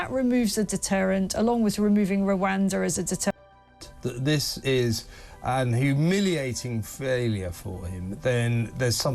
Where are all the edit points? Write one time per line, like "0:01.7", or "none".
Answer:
0:03.5